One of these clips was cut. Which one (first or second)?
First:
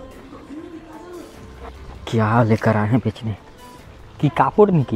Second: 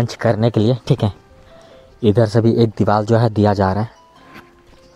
first